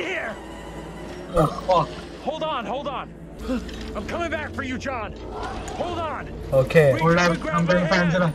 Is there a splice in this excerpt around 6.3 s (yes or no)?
no